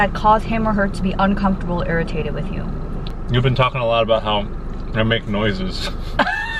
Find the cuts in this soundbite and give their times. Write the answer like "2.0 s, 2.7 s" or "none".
3.1 s